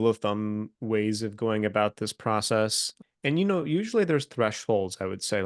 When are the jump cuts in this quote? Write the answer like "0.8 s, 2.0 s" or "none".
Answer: 2.9 s